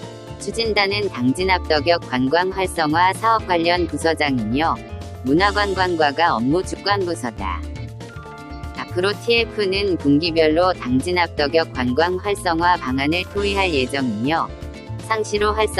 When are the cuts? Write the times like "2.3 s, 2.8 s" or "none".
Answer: 7.6 s, 8.9 s